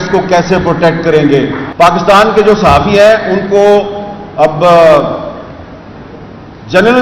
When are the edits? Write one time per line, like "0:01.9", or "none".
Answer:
0:01.6